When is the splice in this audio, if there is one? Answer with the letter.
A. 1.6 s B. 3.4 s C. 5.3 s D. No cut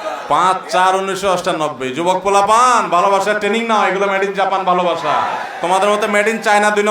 C